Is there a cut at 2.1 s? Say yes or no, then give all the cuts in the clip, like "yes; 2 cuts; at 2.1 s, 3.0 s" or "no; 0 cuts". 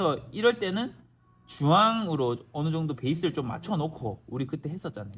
no; 0 cuts